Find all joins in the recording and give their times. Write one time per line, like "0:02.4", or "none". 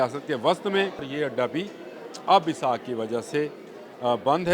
0:01.1